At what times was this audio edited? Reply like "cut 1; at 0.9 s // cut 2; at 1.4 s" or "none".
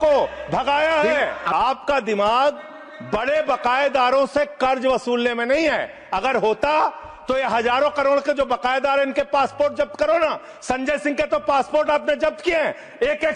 none